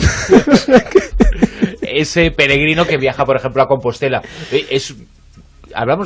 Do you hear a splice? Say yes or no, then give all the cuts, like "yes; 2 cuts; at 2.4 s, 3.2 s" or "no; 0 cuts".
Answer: no; 0 cuts